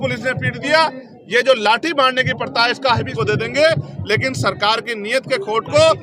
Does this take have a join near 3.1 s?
yes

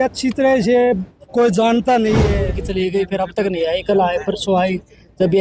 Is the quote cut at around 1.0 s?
no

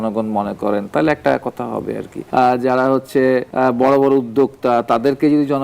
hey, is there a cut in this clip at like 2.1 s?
yes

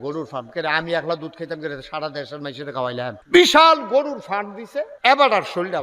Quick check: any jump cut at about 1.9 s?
no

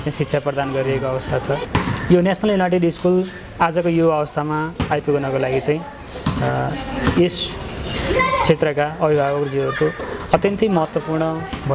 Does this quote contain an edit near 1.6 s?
yes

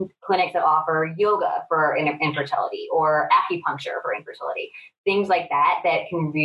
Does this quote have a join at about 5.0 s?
no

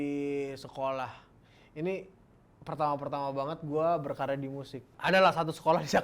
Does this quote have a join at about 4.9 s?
yes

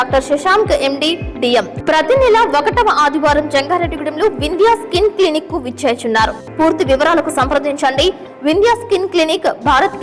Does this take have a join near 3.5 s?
no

